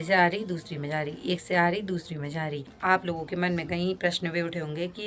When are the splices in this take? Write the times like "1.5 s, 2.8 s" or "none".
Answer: 2.7 s